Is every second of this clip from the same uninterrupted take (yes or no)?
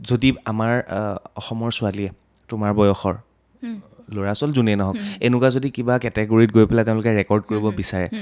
yes